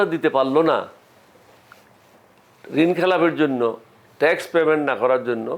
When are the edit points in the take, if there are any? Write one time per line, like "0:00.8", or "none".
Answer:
none

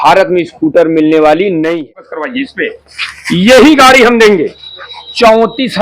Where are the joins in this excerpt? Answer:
0:01.9

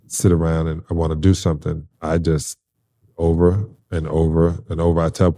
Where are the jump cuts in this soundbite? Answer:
none

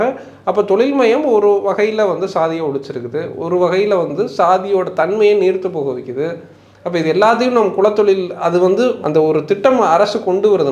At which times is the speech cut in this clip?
0:09.0

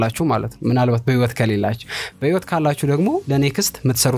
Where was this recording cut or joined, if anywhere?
0:03.2

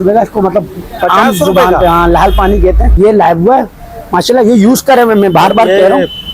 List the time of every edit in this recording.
0:02.9

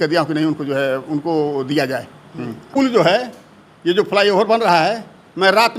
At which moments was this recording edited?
0:02.7

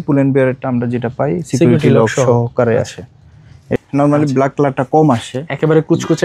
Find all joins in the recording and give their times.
0:03.8

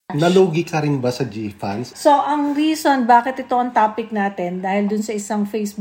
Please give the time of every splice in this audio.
0:01.9

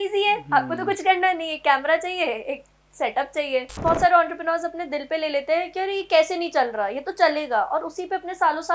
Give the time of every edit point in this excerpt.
0:03.7

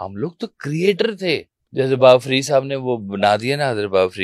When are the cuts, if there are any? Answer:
0:01.6

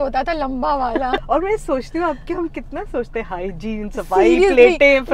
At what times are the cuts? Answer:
0:01.2

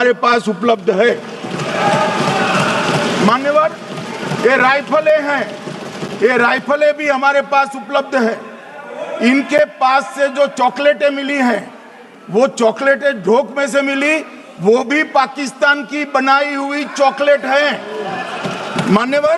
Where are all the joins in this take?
none

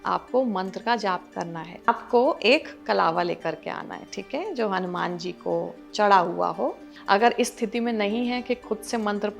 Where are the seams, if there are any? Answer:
0:01.9
0:06.9

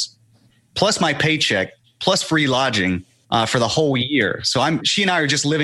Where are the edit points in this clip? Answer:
0:03.1

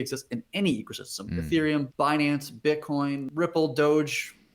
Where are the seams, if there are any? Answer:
0:01.9
0:03.3

